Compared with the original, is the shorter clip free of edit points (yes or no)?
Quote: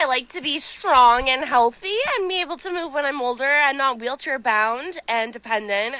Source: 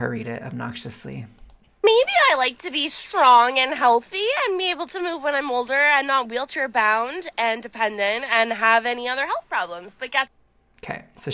yes